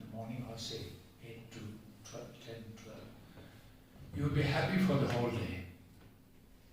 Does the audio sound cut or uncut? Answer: uncut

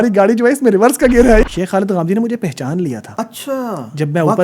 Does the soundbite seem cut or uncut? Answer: cut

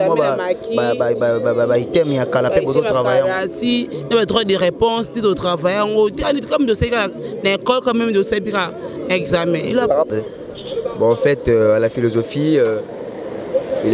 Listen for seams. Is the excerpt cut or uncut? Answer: cut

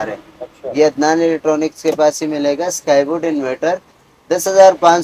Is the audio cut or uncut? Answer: uncut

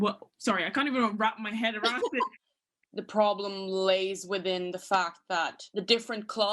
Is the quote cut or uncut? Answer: cut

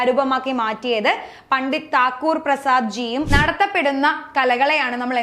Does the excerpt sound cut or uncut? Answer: cut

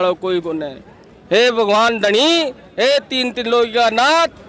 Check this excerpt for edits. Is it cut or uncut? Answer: uncut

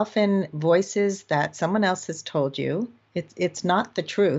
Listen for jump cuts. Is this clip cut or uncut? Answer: uncut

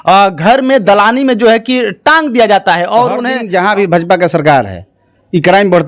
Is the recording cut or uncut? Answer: cut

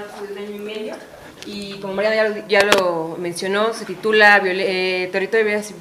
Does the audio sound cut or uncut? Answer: uncut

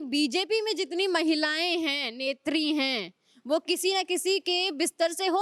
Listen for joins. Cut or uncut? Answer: uncut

